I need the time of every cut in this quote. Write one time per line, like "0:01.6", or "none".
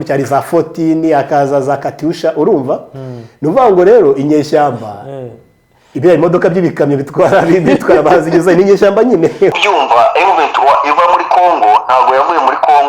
0:09.5